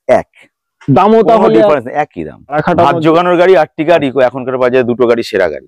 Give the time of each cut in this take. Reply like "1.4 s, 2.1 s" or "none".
2.6 s